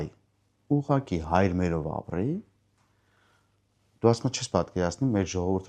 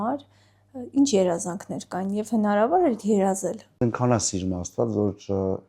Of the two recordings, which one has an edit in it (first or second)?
second